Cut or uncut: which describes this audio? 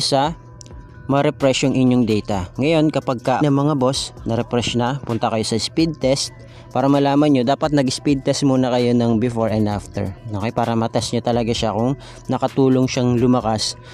cut